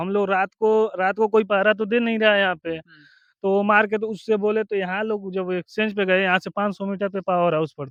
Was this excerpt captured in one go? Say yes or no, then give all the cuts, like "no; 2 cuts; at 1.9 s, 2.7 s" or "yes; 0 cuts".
yes; 0 cuts